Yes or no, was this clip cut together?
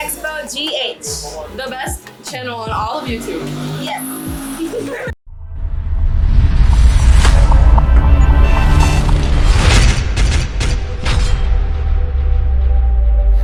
no